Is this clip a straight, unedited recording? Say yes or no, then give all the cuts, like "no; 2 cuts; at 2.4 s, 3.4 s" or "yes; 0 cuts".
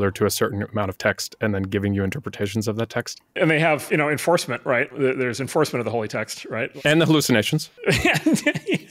no; 4 cuts; at 3.3 s, 4.9 s, 6.7 s, 7.7 s